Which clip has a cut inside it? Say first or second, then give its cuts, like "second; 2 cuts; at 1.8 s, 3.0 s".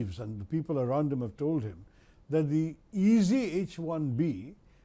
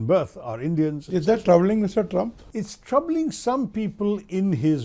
second; 1 cut; at 2.4 s